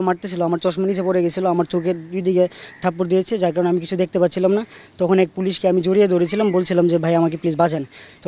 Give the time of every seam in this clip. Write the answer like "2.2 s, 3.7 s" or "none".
none

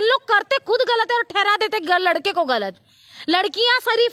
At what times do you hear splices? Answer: none

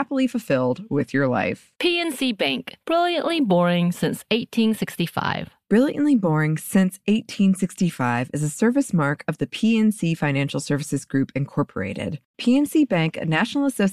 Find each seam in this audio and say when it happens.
none

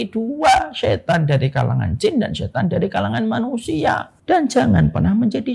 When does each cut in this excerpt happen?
4.1 s

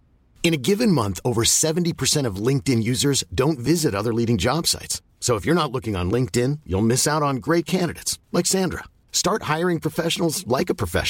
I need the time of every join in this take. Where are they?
none

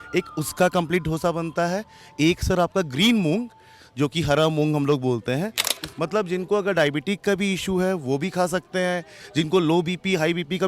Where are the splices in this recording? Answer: 5.7 s

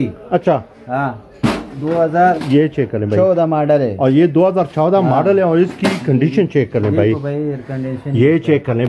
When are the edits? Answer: none

